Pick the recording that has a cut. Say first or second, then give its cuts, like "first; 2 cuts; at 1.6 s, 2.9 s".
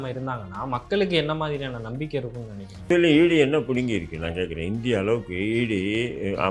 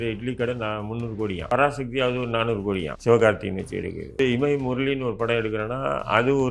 second; 3 cuts; at 1.5 s, 2.9 s, 4.2 s